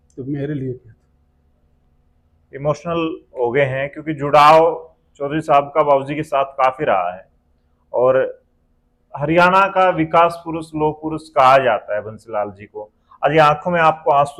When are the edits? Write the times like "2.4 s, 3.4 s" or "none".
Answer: none